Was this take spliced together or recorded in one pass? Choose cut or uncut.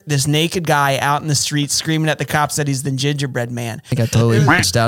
cut